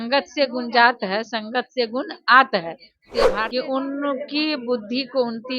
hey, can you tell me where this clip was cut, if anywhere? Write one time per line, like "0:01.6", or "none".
0:03.3